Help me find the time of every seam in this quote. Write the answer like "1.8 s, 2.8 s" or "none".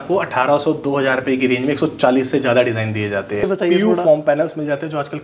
3.5 s